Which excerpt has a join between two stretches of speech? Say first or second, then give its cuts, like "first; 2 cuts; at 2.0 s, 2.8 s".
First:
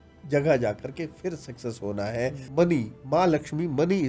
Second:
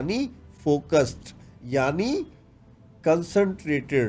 first; 1 cut; at 2.4 s